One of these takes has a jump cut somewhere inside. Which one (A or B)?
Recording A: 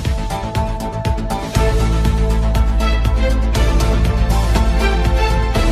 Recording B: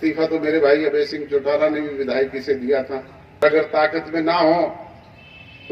B